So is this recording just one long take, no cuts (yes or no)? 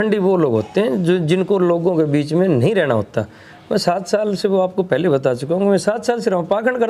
yes